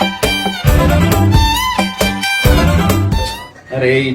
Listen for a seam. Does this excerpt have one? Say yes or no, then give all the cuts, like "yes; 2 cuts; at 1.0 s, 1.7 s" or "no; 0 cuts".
yes; 1 cut; at 3.2 s